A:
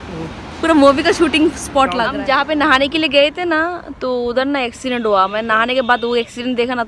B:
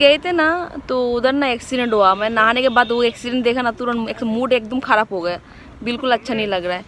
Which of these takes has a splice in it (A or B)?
A